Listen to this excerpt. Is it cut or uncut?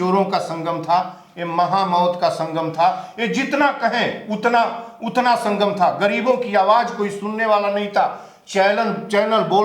uncut